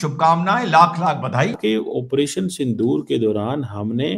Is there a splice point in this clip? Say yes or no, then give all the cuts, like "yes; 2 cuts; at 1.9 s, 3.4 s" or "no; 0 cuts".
yes; 1 cut; at 1.6 s